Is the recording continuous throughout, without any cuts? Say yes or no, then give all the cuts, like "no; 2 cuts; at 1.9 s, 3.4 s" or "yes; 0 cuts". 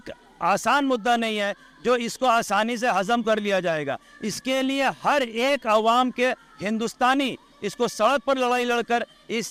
yes; 0 cuts